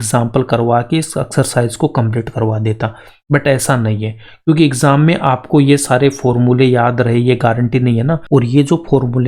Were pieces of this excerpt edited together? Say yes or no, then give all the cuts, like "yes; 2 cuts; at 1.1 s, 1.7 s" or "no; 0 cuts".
yes; 1 cut; at 8.2 s